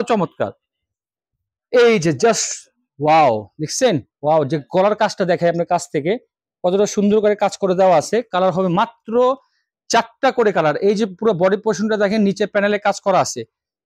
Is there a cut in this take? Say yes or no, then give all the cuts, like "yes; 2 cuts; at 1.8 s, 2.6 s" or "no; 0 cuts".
no; 0 cuts